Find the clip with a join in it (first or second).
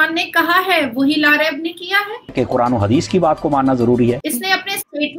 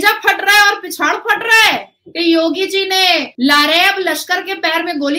first